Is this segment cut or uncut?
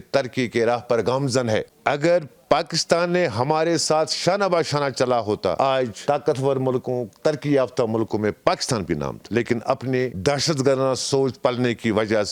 uncut